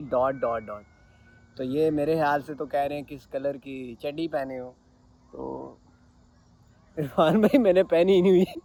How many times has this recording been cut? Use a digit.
0